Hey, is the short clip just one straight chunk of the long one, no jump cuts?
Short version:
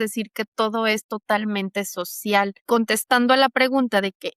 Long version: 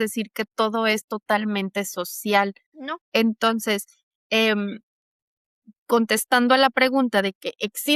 no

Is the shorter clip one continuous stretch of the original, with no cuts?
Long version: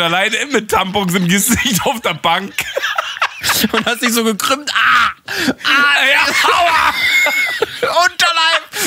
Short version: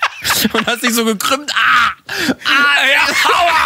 yes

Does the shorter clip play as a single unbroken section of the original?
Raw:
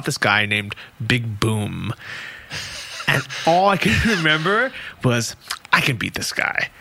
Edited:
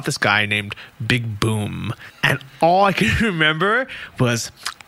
no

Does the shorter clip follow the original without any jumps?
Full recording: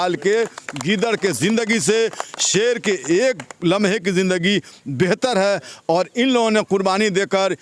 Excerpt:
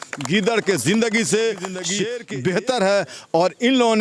no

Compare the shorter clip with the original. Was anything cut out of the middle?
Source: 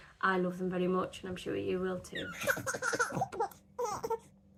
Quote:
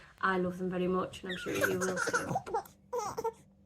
yes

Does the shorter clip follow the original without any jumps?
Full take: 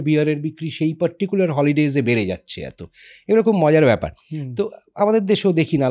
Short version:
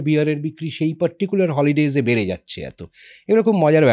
yes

